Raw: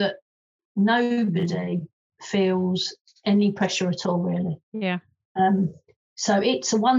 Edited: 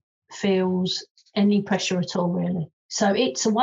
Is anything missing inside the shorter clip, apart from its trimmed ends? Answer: yes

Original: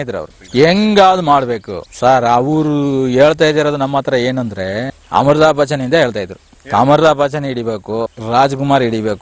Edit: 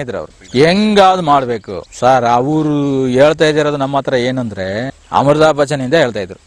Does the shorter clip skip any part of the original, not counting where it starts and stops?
no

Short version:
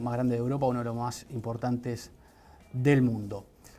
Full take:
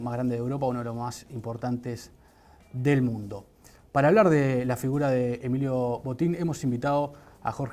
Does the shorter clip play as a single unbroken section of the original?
yes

